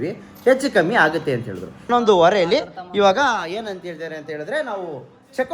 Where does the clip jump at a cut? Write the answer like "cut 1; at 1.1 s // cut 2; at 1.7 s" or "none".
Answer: cut 1; at 1.9 s